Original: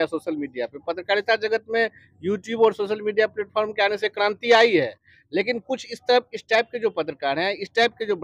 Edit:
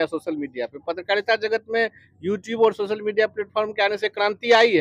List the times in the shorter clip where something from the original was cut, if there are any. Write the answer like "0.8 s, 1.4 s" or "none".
none